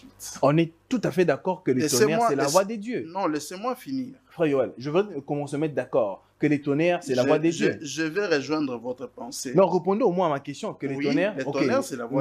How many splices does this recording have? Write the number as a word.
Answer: zero